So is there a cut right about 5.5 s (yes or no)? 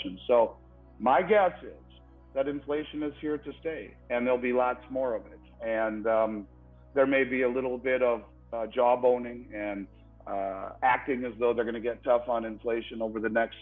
no